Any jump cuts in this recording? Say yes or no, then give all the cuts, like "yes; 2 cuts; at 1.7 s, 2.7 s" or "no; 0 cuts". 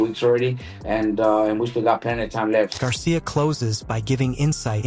no; 0 cuts